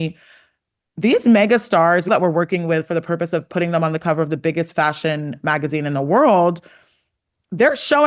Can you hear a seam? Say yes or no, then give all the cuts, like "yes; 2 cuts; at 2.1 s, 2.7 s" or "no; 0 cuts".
yes; 1 cut; at 2.1 s